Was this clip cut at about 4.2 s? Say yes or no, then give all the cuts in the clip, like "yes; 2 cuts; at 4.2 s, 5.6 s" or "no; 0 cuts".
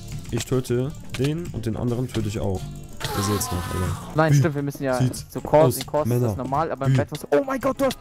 yes; 1 cut; at 4.2 s